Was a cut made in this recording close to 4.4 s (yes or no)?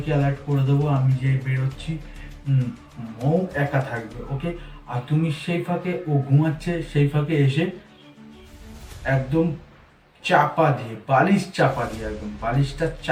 no